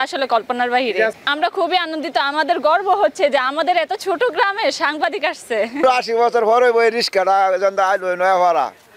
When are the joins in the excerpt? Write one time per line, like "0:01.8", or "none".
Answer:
0:01.2
0:05.8